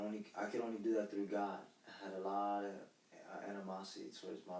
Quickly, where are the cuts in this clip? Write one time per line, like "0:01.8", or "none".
none